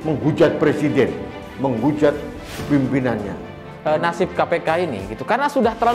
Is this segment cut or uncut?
cut